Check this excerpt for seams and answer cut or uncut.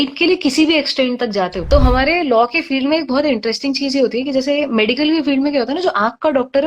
cut